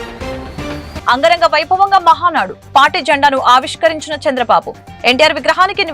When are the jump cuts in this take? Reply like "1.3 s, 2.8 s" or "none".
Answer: 1.0 s